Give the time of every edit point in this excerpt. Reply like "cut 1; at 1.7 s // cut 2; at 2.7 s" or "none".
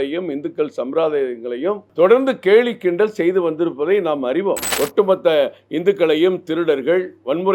cut 1; at 4.7 s